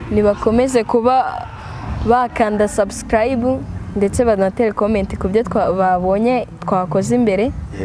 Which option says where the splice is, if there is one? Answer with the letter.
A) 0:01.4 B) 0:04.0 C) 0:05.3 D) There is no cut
D